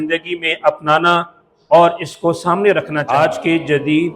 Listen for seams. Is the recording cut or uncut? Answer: cut